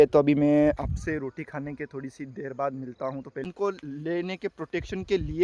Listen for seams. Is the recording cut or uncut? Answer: cut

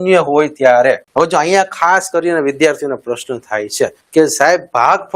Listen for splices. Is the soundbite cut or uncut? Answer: cut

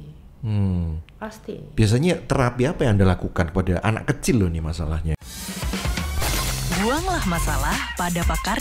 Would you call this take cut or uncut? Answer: cut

